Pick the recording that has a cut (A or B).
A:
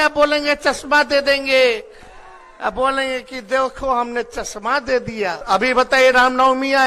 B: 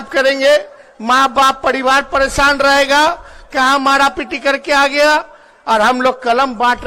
A